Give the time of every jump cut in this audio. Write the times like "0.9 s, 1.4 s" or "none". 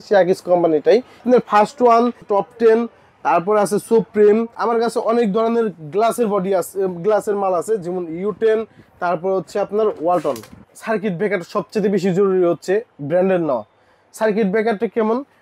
1.2 s, 2.2 s, 4.5 s, 10.7 s